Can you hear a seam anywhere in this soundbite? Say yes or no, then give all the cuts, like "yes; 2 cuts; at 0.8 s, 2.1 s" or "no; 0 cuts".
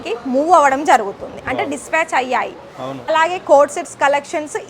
yes; 1 cut; at 3.1 s